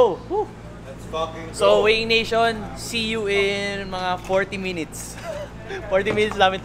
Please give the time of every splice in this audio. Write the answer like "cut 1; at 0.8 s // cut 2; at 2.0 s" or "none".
none